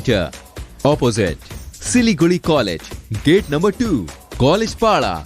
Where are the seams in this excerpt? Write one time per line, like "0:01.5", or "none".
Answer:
none